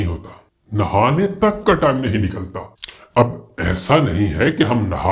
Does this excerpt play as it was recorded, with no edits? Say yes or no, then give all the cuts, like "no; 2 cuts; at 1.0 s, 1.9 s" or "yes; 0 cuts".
yes; 0 cuts